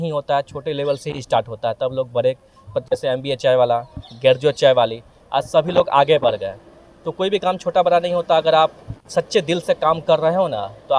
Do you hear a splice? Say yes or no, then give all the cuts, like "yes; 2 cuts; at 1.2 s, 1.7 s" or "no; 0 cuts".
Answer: no; 0 cuts